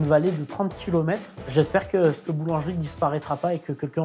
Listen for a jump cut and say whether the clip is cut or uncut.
cut